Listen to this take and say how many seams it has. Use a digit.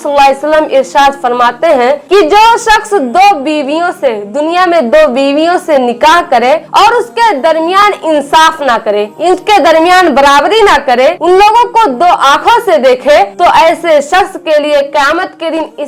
0